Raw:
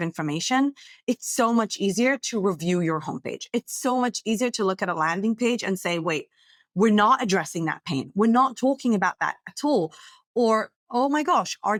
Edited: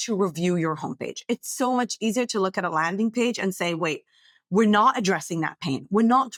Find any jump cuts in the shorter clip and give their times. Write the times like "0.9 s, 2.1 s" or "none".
none